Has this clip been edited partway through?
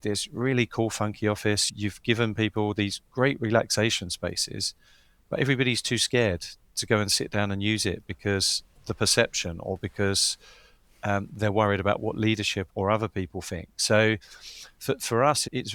no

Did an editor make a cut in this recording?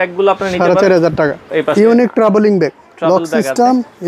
yes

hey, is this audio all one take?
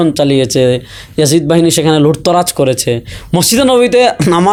yes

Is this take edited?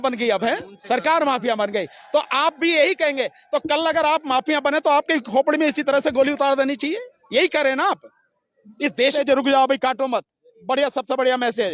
yes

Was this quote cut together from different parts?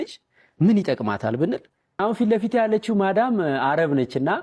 yes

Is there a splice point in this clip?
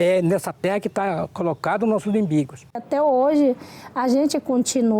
yes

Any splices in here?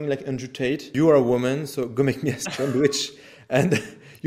yes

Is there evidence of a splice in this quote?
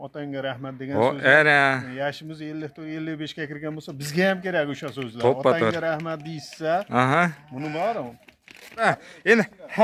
yes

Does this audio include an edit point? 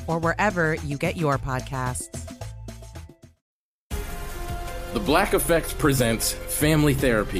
yes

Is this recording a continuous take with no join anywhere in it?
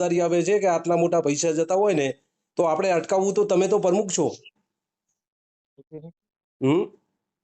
yes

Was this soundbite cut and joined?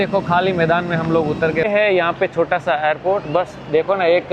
yes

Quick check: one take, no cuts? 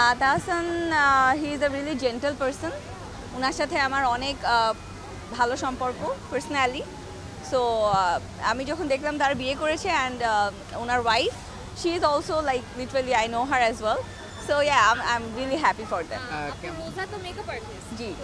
yes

